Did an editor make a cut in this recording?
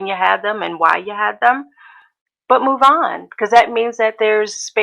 no; 0 cuts

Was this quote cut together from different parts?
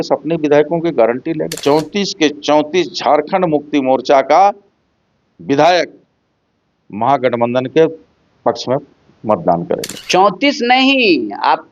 yes; 2 cuts; at 1.5 s, 9.9 s

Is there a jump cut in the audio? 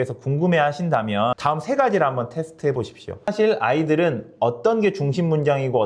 yes; 2 cuts; at 1.4 s, 3.3 s

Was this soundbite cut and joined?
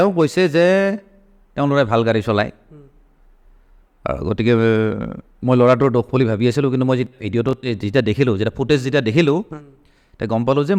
no; 0 cuts

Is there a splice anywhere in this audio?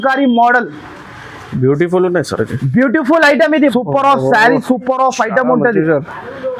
yes; 1 cut; at 3.7 s

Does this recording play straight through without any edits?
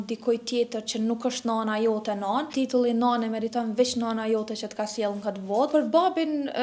no; 2 cuts; at 2.5 s, 5.7 s

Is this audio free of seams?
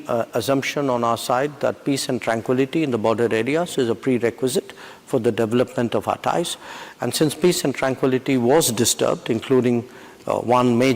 yes; 0 cuts

